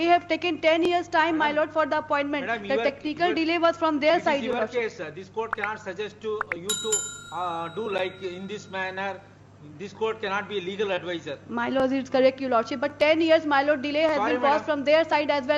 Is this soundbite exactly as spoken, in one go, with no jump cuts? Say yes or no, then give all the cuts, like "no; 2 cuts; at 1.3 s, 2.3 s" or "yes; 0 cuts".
yes; 0 cuts